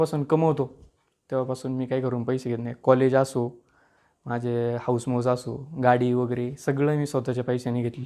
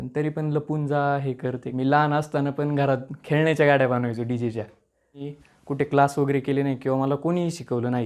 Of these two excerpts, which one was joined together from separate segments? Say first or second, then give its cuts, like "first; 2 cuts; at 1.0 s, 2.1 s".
second; 2 cuts; at 1.7 s, 5.3 s